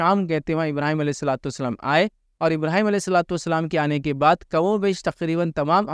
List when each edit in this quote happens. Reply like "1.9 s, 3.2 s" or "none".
none